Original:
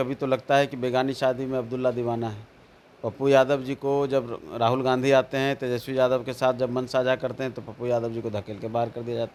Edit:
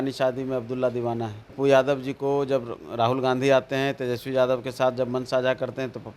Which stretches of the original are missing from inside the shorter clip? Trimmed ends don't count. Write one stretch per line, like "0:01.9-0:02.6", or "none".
0:02.5-0:03.1